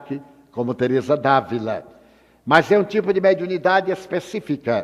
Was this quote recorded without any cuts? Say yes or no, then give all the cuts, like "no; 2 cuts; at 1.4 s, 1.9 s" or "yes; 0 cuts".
no; 1 cut; at 1.0 s